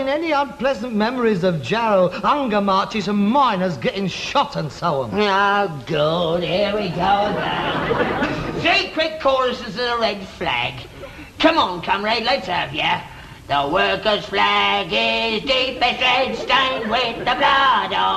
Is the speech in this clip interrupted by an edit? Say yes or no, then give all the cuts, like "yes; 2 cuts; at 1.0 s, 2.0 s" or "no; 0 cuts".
no; 0 cuts